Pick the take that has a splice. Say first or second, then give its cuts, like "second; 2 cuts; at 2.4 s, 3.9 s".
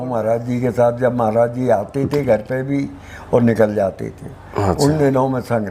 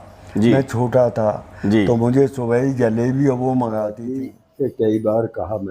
second; 1 cut; at 4.0 s